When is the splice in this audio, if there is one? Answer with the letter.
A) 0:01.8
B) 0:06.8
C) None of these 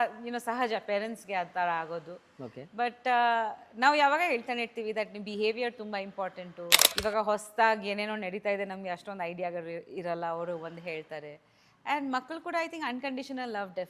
B